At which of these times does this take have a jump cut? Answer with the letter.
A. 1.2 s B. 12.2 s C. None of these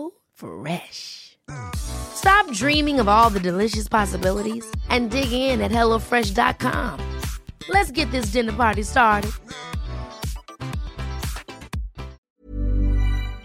B